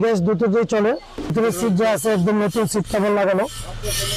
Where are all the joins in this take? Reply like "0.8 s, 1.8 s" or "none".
1.3 s